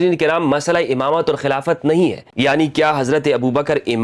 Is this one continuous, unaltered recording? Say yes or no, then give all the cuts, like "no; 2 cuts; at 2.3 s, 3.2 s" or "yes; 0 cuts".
no; 1 cut; at 2.2 s